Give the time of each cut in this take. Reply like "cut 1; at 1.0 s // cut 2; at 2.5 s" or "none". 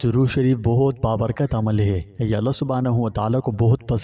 cut 1; at 2.1 s